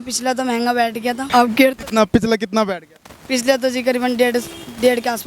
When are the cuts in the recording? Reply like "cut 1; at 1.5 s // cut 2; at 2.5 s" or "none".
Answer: cut 1; at 1.2 s